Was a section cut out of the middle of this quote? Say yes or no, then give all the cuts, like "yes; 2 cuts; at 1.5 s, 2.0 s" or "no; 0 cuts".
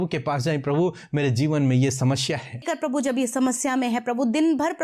yes; 1 cut; at 2.6 s